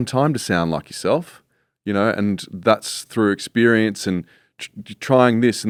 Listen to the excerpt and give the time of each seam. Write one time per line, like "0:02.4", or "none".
none

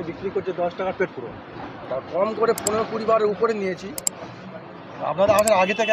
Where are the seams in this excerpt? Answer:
none

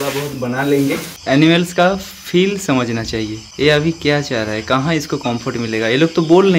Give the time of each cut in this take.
0:01.1
0:03.4

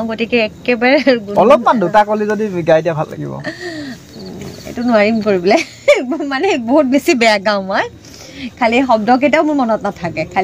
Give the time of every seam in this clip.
none

